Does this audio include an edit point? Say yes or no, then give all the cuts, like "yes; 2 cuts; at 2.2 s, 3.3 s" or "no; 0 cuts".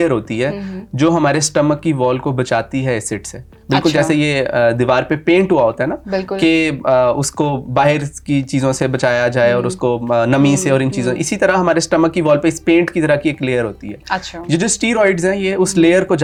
no; 0 cuts